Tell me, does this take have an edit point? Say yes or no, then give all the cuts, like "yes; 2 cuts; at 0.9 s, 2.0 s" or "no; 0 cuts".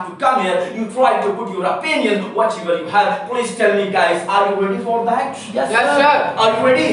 no; 0 cuts